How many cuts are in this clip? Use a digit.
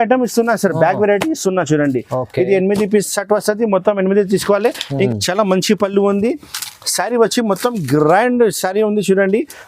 1